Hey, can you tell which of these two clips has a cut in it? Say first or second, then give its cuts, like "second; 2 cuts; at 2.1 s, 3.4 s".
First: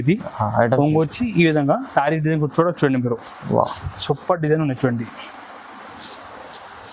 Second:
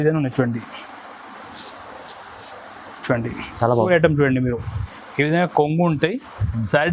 second; 1 cut; at 3.9 s